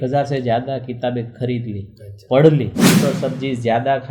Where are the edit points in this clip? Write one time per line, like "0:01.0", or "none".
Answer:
0:03.0